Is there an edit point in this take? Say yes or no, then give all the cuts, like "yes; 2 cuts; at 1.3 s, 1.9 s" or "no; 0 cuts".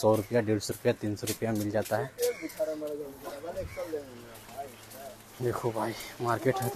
no; 0 cuts